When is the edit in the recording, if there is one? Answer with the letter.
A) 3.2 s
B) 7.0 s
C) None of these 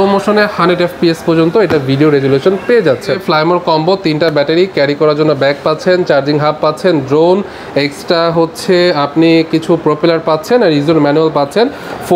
A